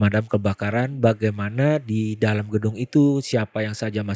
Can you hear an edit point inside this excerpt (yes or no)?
no